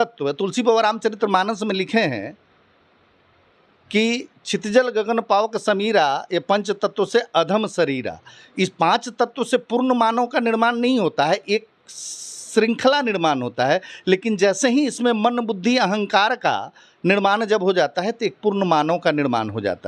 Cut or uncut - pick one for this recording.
uncut